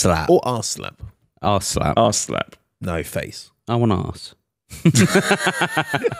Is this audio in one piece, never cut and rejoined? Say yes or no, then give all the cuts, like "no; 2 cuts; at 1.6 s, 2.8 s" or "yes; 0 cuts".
yes; 0 cuts